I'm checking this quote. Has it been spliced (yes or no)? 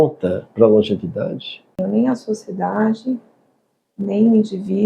yes